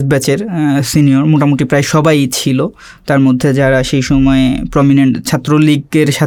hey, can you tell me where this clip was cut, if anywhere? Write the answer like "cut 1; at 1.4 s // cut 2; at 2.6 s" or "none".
none